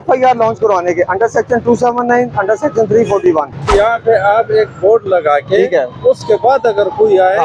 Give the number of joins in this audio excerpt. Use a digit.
1